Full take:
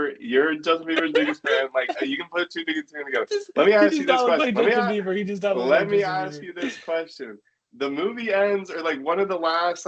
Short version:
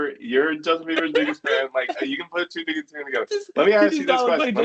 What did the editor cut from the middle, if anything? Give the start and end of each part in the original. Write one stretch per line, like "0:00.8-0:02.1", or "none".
none